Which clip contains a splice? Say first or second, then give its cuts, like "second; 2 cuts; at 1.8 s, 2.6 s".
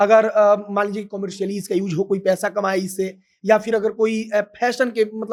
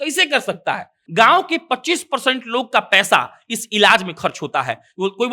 second; 1 cut; at 1.0 s